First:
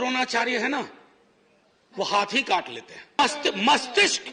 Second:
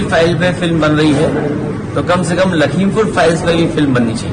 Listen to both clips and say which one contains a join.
first; 1 cut; at 3.2 s

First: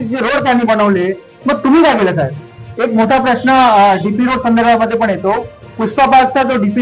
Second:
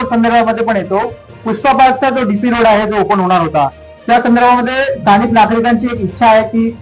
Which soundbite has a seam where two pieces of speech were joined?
first; 1 cut; at 2.6 s

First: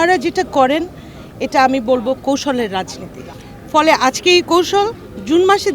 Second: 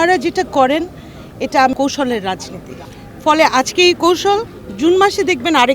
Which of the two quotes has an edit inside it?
second; 1 cut; at 1.7 s

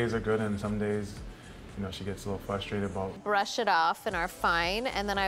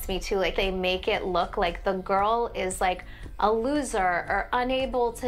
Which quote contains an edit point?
first; 1 cut; at 3.1 s

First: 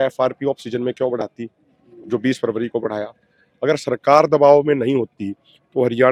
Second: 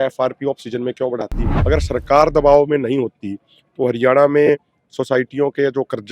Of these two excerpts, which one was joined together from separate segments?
second; 1 cut; at 1.5 s

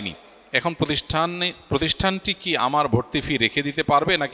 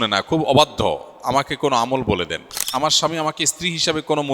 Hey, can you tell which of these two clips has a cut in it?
second; 1 cut; at 2.5 s

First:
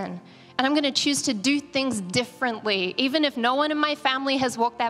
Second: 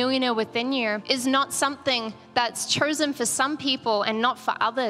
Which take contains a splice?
second; 1 cut; at 1.0 s

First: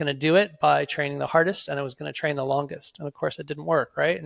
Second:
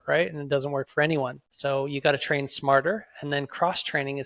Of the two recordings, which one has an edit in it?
second; 1 cut; at 1.5 s

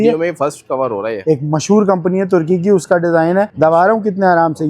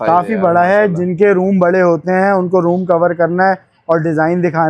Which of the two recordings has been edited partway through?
first; 2 cuts; at 1.1 s, 3.5 s

